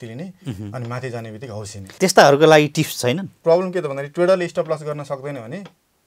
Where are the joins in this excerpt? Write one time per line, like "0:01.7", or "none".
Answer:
0:01.9
0:03.3

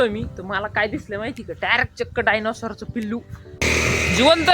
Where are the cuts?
0:03.6

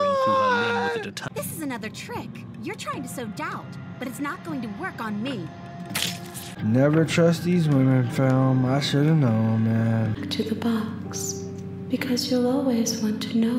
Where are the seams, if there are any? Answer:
0:01.2
0:06.4
0:10.2

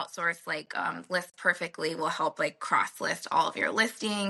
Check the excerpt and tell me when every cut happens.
none

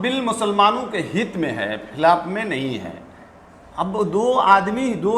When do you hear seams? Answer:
none

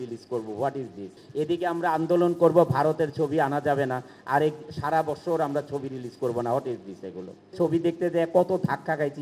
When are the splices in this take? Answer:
0:01.2
0:07.5

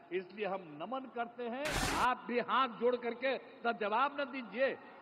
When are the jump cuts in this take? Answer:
0:01.8

